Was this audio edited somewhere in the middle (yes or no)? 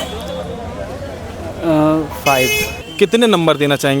yes